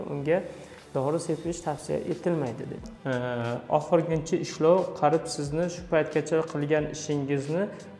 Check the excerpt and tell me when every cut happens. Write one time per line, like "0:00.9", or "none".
0:02.8